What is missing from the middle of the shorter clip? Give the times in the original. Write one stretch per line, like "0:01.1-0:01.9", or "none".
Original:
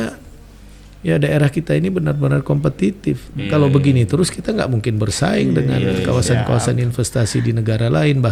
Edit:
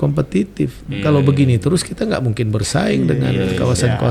none